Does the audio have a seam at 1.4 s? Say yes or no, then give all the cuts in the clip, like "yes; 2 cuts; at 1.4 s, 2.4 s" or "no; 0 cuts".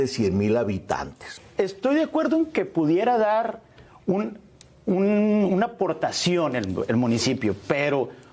yes; 1 cut; at 1.4 s